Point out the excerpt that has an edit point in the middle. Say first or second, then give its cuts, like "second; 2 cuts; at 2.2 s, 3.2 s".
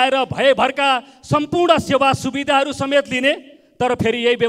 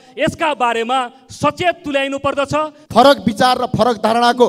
second; 1 cut; at 2.8 s